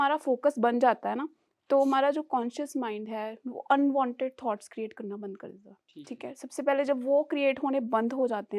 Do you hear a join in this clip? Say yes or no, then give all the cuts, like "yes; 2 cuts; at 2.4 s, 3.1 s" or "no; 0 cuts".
no; 0 cuts